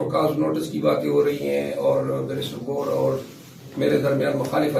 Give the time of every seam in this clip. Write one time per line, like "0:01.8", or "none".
none